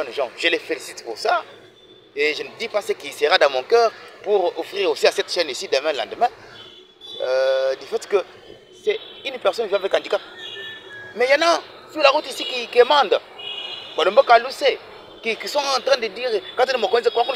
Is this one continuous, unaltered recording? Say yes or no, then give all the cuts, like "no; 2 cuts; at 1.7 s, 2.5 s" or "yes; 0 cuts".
yes; 0 cuts